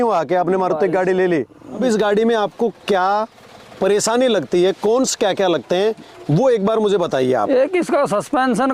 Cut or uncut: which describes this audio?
cut